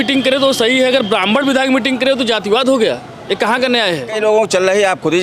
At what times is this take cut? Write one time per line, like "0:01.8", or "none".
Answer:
0:04.1